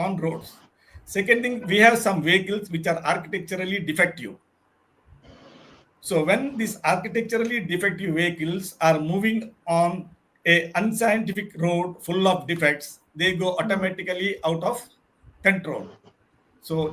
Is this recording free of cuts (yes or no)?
yes